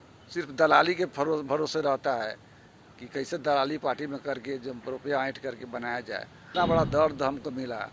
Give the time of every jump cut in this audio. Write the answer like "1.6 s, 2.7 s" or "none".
6.5 s